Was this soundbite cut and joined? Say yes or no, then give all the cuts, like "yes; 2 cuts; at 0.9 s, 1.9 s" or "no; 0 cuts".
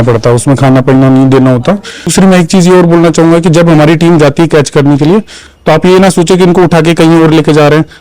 yes; 1 cut; at 2.1 s